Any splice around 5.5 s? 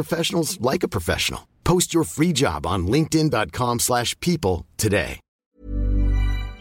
yes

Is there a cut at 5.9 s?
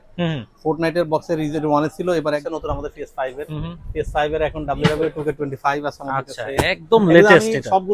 no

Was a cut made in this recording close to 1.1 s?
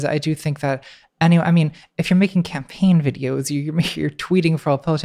no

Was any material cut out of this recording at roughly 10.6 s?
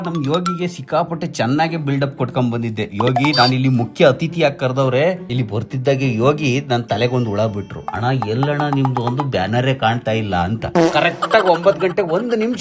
yes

